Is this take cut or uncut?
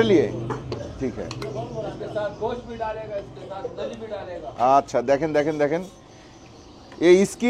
uncut